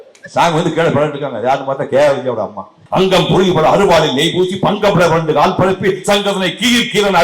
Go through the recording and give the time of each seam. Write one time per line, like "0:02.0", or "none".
0:02.8